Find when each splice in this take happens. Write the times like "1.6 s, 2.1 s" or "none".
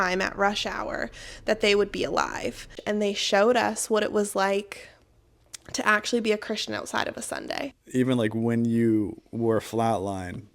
2.8 s, 7.8 s